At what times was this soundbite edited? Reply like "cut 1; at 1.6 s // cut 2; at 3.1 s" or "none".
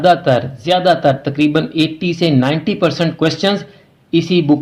none